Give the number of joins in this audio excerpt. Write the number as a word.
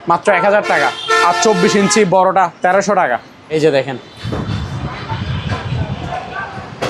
one